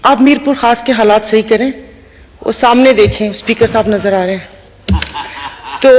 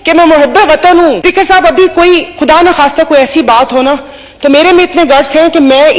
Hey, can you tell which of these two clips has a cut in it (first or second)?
second